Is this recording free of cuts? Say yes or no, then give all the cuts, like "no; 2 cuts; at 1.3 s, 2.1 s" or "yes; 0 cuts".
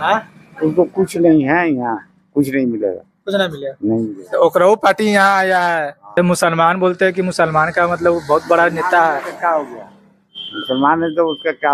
no; 1 cut; at 6.2 s